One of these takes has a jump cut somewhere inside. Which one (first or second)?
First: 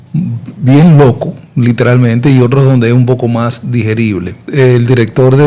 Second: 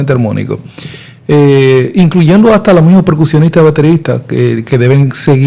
first